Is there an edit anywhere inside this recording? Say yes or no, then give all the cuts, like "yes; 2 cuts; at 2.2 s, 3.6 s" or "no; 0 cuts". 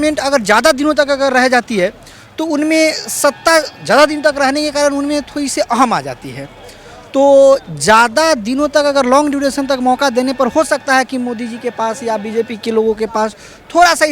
no; 0 cuts